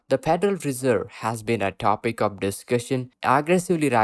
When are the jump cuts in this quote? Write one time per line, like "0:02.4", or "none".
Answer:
0:03.1